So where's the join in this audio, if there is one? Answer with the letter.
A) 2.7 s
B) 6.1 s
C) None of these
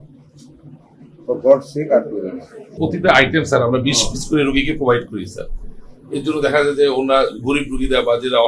A